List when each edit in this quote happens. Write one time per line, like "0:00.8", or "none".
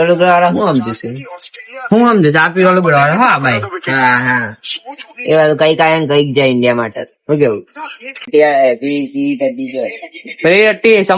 0:08.3